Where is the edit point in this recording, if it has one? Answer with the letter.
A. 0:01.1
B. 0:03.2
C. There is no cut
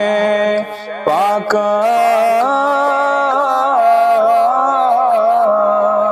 C